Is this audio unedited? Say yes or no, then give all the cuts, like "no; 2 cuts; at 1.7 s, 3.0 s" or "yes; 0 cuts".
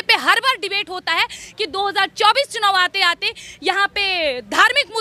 yes; 0 cuts